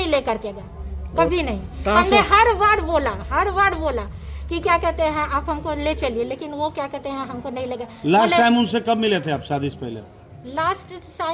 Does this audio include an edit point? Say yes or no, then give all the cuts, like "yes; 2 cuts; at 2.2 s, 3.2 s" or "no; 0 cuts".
no; 0 cuts